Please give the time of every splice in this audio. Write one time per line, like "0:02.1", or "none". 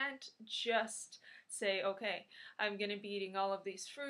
0:01.0